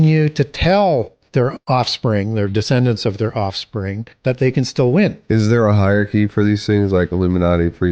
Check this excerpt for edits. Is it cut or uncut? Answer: cut